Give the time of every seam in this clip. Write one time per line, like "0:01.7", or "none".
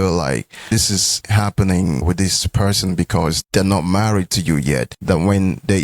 0:00.8
0:02.0
0:03.4
0:04.9

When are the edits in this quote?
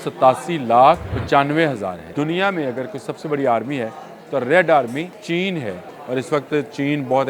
0:01.1
0:02.0
0:05.2
0:05.9

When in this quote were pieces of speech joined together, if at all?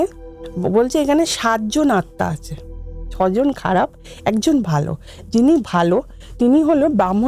none

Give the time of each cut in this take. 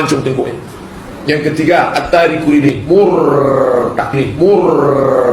0:01.0

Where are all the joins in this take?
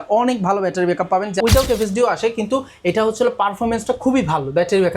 0:01.4

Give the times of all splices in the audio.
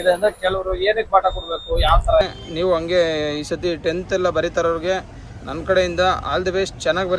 0:02.3

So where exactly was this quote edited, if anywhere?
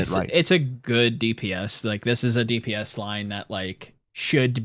none

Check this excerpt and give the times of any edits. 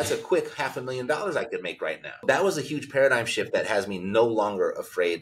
0:02.2

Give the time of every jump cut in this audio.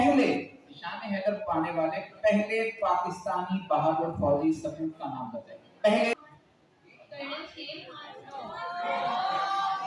0:06.2

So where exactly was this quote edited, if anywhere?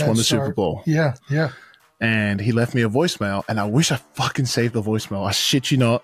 none

